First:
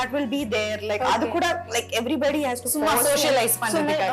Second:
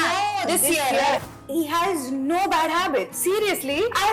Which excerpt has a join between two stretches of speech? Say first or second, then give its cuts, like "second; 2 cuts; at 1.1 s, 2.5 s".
second; 1 cut; at 1.2 s